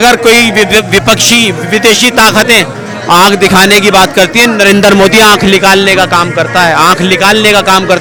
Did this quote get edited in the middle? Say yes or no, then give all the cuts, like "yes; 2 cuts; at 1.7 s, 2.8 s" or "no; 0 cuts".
no; 0 cuts